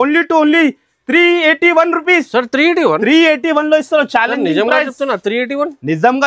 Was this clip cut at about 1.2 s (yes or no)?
no